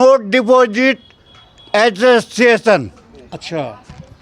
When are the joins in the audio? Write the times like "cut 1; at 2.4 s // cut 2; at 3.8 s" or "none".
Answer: none